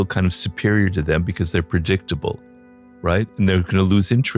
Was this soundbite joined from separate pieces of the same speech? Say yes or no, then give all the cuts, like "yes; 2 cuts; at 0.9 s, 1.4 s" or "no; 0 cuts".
no; 0 cuts